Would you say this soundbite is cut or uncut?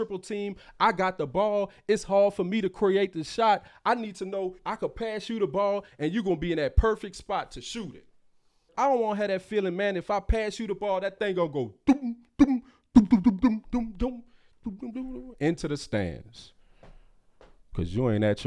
cut